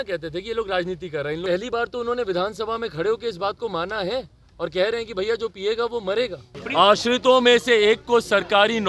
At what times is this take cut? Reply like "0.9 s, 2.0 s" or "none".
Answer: 1.4 s, 6.5 s